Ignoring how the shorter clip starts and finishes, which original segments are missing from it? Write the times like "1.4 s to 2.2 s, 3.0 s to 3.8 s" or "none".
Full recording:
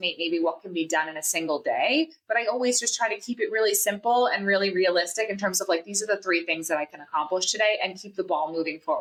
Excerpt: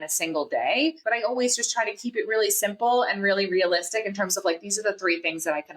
2.1 s to 2.2 s